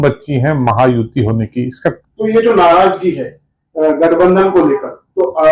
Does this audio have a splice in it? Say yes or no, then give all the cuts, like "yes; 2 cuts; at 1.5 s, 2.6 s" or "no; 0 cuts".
yes; 1 cut; at 2.0 s